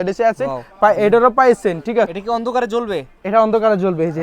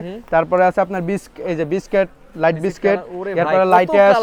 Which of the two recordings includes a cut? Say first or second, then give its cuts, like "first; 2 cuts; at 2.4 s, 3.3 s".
first; 1 cut; at 2.2 s